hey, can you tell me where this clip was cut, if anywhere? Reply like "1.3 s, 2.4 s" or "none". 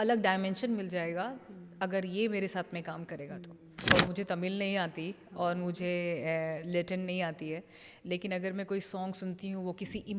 3.9 s